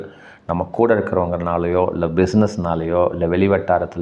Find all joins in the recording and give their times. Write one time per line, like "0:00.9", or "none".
none

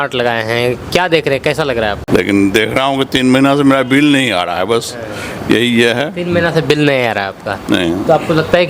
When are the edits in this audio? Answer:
0:02.0

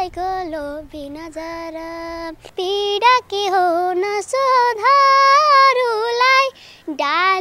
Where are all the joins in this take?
0:02.5

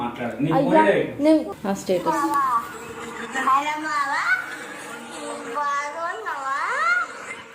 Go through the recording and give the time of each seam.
0:01.5

